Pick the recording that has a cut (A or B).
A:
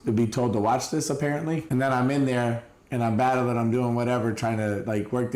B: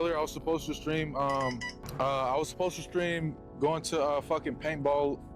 B